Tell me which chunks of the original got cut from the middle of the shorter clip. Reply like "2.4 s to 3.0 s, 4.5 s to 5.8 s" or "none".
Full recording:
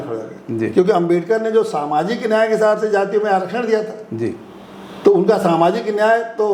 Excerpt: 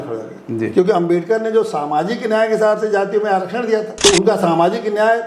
3.9 s to 4.9 s